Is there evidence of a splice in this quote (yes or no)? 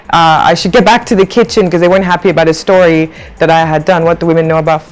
no